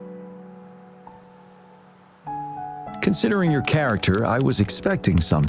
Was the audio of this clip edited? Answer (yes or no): no